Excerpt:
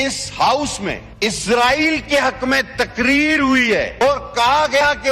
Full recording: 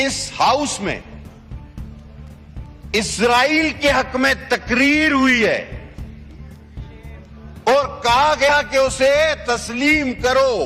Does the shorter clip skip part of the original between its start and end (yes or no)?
yes